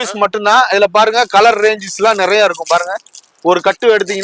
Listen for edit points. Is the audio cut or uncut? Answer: uncut